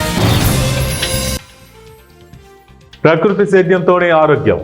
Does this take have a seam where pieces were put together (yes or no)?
yes